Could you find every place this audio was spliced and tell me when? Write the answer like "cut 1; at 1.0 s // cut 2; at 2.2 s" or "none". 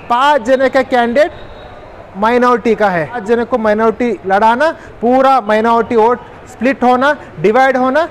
cut 1; at 3.2 s